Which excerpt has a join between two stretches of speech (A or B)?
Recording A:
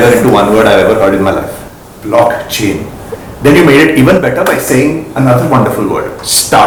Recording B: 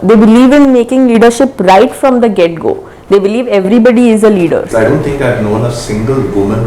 B